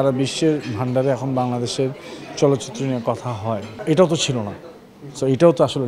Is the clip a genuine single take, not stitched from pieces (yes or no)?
no